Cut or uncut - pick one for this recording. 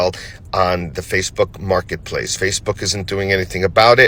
uncut